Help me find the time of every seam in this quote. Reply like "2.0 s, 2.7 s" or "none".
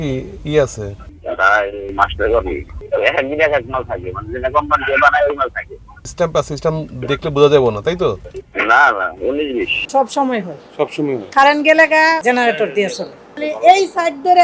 9.8 s